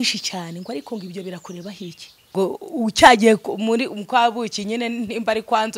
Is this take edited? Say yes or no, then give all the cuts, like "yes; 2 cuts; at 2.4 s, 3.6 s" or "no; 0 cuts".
yes; 1 cut; at 2.3 s